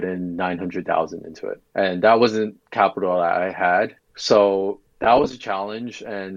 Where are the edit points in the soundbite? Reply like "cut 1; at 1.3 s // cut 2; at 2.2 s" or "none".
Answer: cut 1; at 1.6 s // cut 2; at 2.6 s // cut 3; at 4.0 s